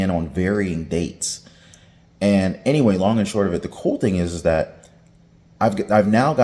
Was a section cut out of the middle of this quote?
no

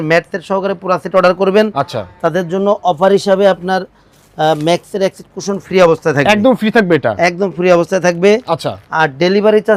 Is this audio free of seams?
yes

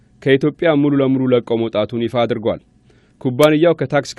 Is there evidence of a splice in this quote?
yes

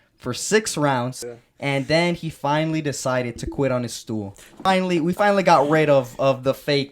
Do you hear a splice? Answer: yes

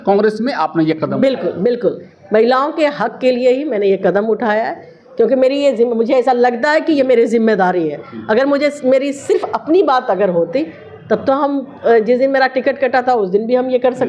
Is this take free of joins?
yes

